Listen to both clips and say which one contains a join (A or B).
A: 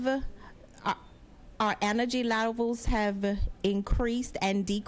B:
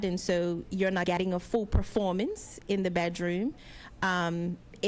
B